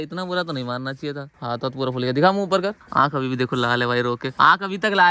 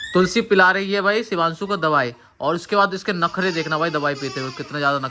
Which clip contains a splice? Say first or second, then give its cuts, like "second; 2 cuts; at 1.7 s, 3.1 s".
first; 1 cut; at 2.8 s